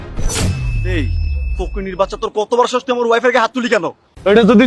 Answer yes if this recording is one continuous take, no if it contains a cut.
no